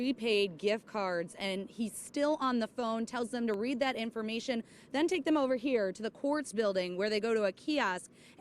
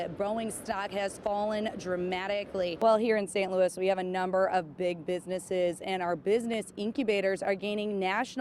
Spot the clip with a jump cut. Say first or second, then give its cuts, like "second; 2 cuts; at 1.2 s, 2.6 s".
second; 1 cut; at 2.8 s